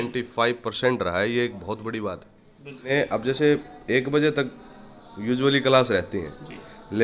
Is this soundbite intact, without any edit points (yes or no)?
no